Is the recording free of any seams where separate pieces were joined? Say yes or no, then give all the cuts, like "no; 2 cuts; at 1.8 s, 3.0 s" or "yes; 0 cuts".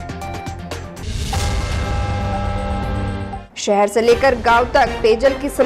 no; 1 cut; at 3.4 s